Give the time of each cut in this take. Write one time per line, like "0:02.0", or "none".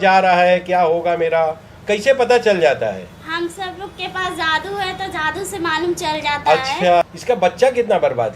0:07.1